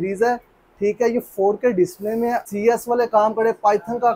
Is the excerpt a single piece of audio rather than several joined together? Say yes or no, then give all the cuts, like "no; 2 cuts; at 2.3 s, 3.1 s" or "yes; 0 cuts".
no; 1 cut; at 2.4 s